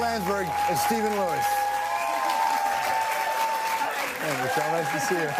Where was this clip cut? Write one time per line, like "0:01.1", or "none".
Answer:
none